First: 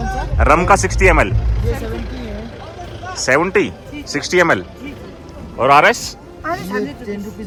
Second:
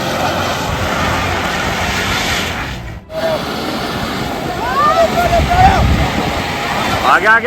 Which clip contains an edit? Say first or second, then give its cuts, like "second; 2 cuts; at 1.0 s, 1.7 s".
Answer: second; 1 cut; at 3.1 s